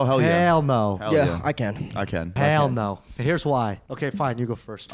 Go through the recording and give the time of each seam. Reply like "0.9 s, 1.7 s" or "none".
2.4 s, 3.8 s